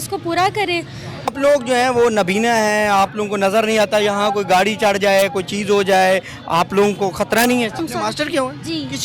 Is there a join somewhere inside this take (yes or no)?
yes